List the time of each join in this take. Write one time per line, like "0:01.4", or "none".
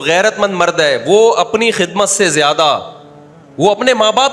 none